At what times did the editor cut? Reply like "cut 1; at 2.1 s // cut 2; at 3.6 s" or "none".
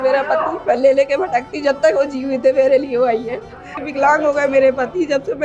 cut 1; at 3.7 s